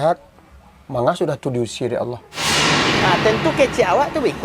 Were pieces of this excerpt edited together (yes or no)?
yes